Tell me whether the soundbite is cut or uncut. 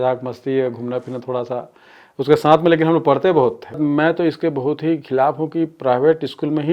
cut